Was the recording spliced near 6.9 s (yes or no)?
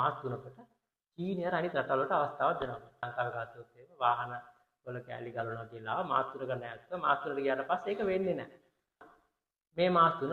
no